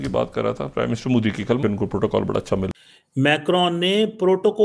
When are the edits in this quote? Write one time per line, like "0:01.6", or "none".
0:02.7